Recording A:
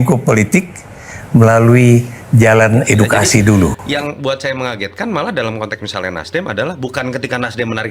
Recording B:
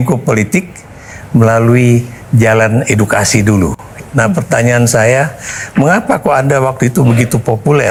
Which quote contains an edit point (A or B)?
A